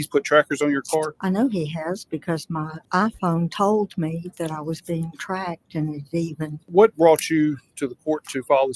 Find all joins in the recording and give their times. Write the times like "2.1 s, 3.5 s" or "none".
1.1 s, 2.7 s, 6.5 s